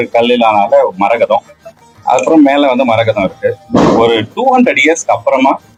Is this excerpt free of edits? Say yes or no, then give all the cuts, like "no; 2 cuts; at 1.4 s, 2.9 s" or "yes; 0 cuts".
yes; 0 cuts